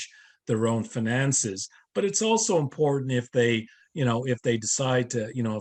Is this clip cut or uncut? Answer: uncut